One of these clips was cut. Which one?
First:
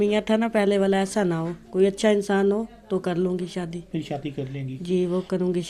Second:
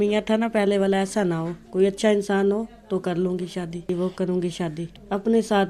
second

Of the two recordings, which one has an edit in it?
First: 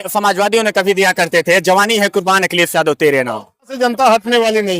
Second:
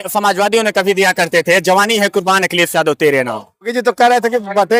first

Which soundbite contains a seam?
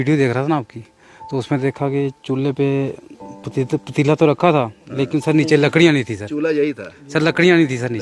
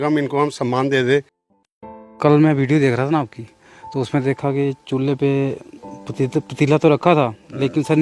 second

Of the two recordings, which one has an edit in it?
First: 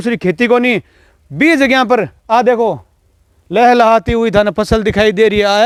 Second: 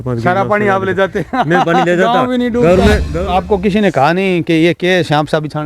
second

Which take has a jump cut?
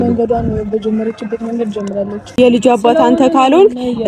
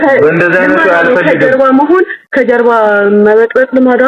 first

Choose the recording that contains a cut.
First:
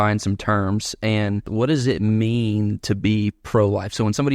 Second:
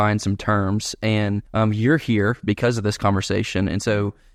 first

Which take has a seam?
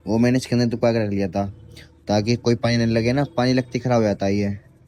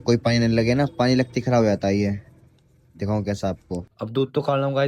second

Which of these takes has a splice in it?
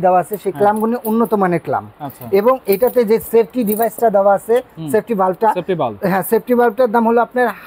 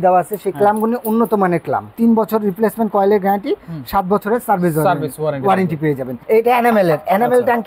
second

